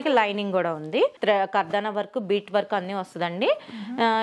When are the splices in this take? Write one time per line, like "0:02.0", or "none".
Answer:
0:01.2